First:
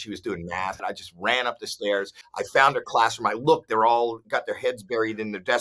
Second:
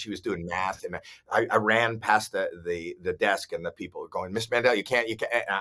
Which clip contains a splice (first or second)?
first